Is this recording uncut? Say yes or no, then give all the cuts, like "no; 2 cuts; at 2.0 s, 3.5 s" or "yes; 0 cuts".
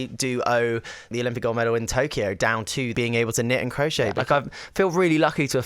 no; 3 cuts; at 1.1 s, 2.9 s, 4.2 s